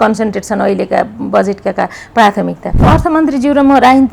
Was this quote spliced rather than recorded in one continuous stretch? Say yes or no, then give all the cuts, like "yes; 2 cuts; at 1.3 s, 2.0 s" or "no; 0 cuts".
yes; 1 cut; at 2.8 s